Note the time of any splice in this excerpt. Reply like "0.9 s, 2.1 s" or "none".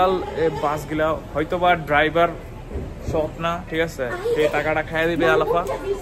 none